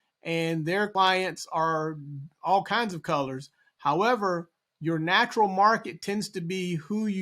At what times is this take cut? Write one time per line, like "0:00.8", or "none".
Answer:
0:00.9